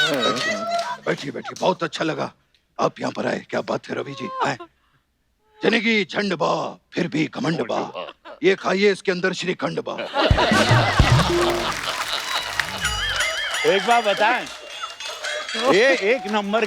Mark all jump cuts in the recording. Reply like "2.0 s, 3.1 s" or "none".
12.6 s